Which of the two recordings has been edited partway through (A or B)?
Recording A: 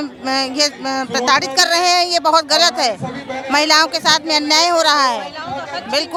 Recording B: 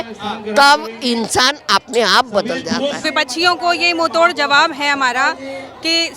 B